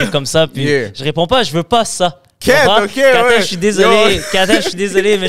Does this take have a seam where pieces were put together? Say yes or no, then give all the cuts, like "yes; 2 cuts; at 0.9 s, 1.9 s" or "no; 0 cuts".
no; 0 cuts